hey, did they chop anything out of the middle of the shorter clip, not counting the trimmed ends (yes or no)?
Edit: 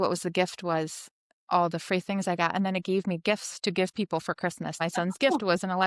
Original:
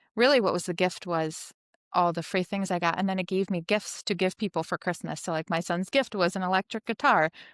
yes